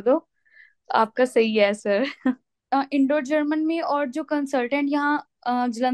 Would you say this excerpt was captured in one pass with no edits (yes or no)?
no